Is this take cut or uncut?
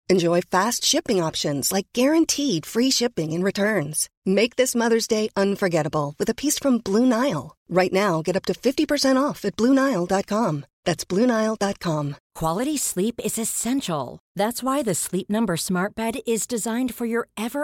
cut